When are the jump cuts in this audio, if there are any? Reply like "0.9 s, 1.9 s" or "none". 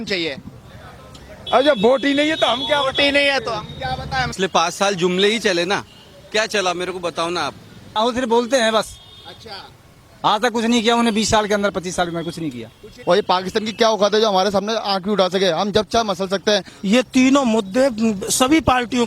4.3 s, 7.8 s, 12.9 s, 16.7 s